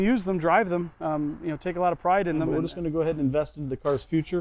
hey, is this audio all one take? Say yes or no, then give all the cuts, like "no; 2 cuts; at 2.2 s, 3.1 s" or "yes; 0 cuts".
no; 1 cut; at 2.5 s